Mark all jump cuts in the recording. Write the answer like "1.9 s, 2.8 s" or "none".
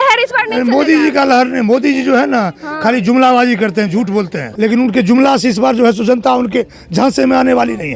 4.4 s